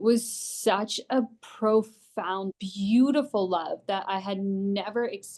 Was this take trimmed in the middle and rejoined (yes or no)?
yes